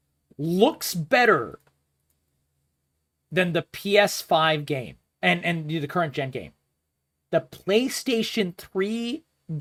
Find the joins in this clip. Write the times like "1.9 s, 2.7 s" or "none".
none